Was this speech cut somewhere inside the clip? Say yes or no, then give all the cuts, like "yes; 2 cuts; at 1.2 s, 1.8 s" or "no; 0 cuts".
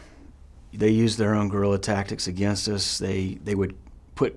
yes; 1 cut; at 3.4 s